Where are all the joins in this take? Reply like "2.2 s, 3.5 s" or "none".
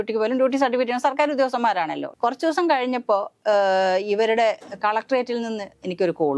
2.0 s